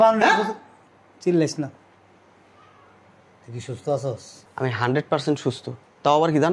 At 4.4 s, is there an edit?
yes; 1 cut; at 4.4 s

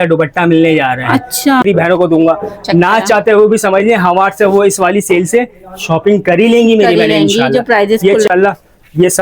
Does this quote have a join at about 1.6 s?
yes; 2 cuts; at 1.6 s, 8.3 s

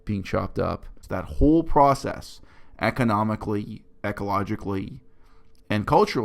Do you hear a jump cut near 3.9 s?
no; 1 cut; at 0.9 s

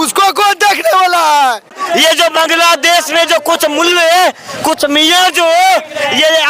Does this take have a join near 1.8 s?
yes; 1 cut; at 1.8 s

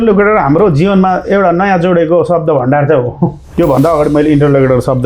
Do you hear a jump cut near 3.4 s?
yes; 1 cut; at 3.4 s

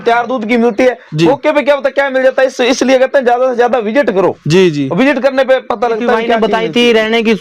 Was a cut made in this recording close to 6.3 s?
yes; 1 cut; at 6.3 s

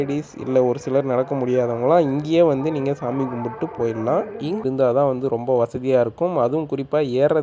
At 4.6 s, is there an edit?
yes; 1 cut; at 4.6 s

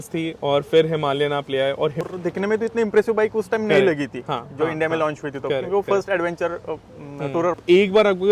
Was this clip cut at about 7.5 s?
yes; 2 cuts; at 2.0 s, 7.5 s

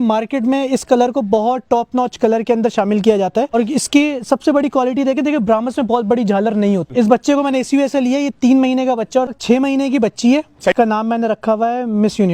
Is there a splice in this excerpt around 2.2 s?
no; 4 cuts; at 3.6 s, 6.9 s, 9.3 s, 10.7 s

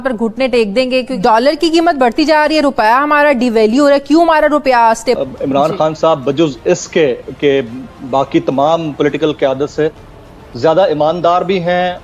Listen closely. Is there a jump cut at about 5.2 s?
yes; 2 cuts; at 1.1 s, 5.2 s

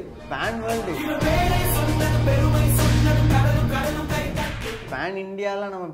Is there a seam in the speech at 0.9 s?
yes; 2 cuts; at 0.9 s, 4.8 s

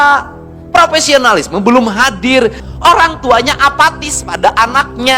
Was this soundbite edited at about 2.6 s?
yes; 1 cut; at 2.6 s

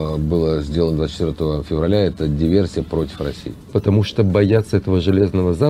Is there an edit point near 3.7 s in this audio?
yes; 1 cut; at 3.7 s

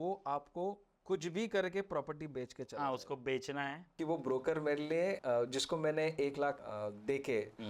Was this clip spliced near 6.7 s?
yes; 3 cuts; at 3.8 s, 5.2 s, 6.7 s

